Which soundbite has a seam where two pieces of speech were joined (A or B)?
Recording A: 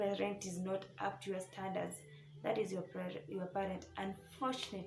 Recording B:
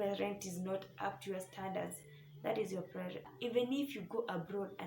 B